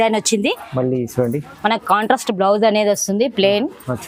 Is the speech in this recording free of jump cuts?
yes; 0 cuts

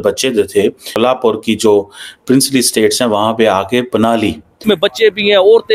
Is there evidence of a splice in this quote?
yes; 2 cuts; at 0.9 s, 4.6 s

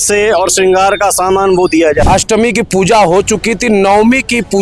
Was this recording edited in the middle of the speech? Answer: yes; 1 cut; at 2.0 s

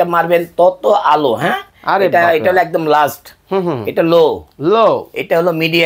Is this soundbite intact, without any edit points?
yes; 0 cuts

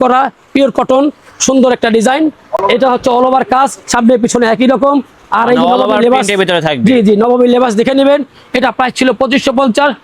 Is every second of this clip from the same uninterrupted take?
yes; 0 cuts

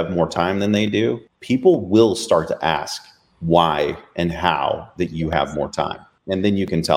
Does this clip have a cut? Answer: yes; 2 cuts; at 1.3 s, 6.1 s

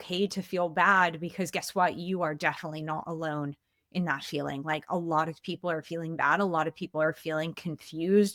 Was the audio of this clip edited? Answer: no; 0 cuts

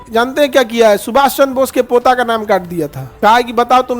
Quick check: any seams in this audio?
yes; 1 cut; at 3.0 s

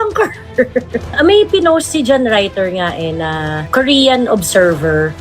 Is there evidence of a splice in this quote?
yes; 1 cut; at 1.1 s

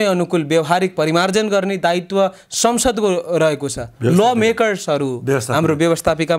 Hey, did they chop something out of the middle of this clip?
no; 0 cuts

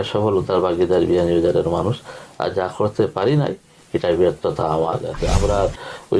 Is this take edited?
yes; 1 cut; at 5.1 s

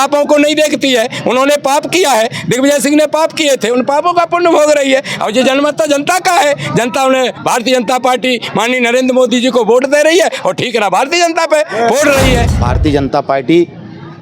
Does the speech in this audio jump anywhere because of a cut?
yes; 1 cut; at 12.5 s

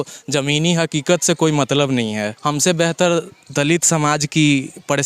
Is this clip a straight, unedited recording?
no; 1 cut; at 2.3 s

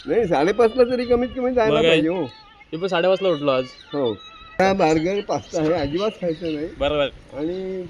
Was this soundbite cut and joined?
yes; 1 cut; at 4.6 s

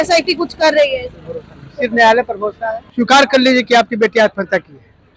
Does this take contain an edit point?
yes; 1 cut; at 2.8 s

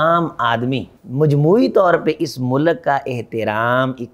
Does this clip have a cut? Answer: yes; 1 cut; at 1.0 s

